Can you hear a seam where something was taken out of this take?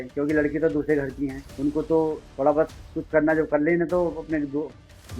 yes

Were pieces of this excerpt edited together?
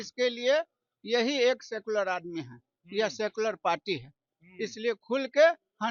no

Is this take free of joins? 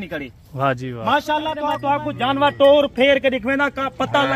no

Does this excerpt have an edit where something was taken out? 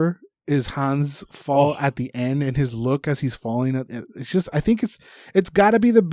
no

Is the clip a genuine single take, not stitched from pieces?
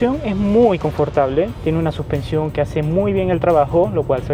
yes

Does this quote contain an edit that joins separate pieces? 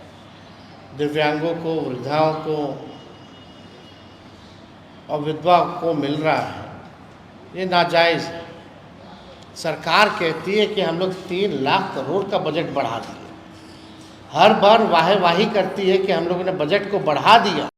no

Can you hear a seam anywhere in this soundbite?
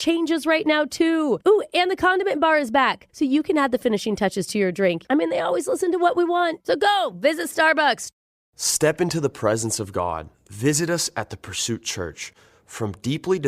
yes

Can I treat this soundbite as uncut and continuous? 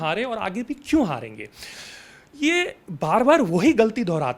yes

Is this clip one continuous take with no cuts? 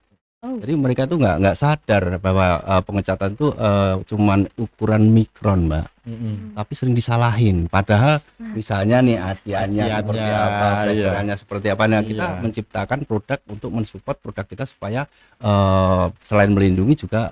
yes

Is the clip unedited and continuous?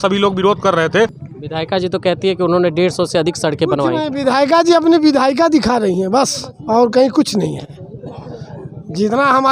no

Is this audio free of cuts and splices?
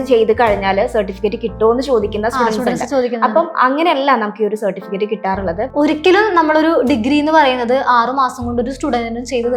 no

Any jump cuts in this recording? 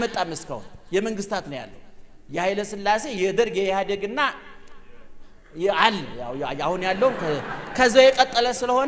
no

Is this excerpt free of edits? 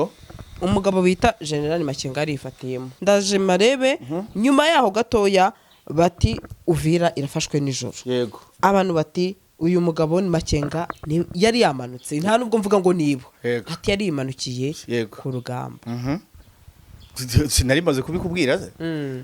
no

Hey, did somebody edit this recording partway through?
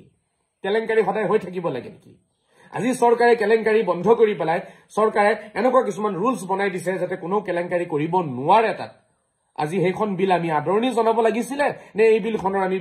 no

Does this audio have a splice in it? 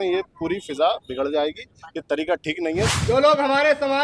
yes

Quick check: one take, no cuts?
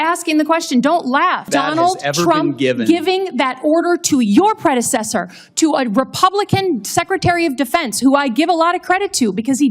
no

